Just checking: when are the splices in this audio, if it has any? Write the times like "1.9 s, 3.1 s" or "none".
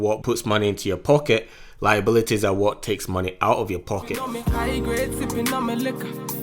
4.2 s